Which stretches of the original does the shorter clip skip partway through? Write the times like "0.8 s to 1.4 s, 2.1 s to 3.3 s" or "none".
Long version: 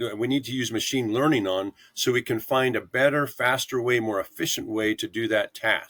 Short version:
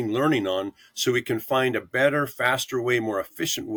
none